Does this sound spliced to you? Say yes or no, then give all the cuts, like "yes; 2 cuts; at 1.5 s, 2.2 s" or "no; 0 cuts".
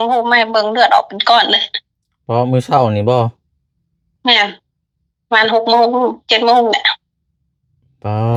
no; 0 cuts